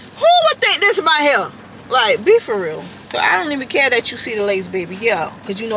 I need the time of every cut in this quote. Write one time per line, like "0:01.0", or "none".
none